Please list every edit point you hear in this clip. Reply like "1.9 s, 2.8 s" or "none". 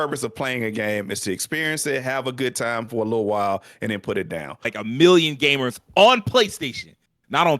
4.7 s